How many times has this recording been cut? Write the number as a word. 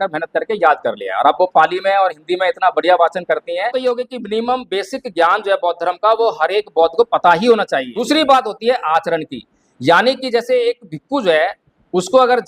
two